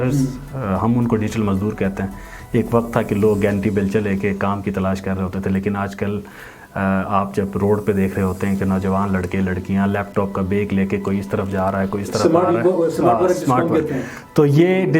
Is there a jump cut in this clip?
no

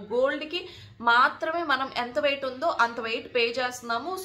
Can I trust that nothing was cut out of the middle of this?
yes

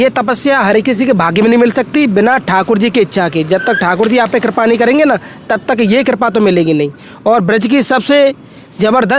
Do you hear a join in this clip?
no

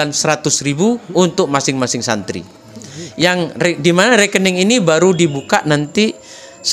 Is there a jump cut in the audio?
no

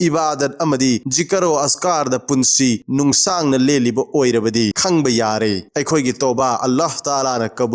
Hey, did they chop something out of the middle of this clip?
yes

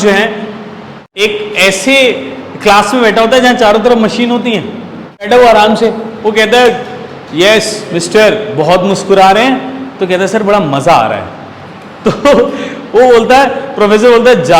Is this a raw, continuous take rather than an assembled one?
no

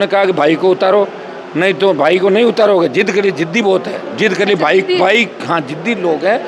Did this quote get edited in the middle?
no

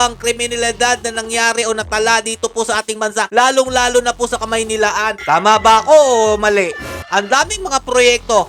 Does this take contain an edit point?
yes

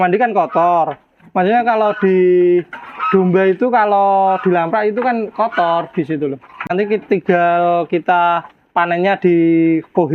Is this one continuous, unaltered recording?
no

